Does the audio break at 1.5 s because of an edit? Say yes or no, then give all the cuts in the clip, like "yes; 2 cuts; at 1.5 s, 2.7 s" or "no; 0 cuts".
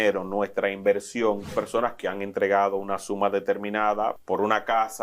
yes; 2 cuts; at 1.5 s, 4.2 s